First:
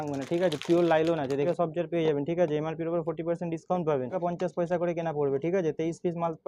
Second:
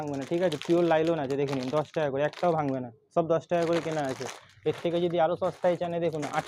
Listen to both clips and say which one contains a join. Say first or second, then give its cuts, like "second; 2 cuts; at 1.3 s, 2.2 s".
first; 2 cuts; at 1.5 s, 4.2 s